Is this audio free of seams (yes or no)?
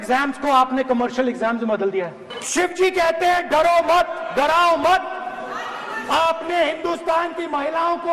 no